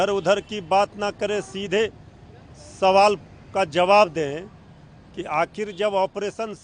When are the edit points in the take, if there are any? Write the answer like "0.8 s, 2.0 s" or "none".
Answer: none